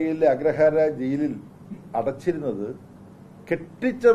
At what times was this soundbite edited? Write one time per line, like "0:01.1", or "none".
none